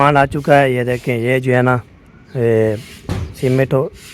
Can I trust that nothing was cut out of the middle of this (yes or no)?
yes